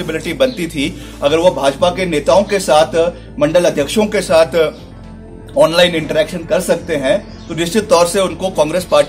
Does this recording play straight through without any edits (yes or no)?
yes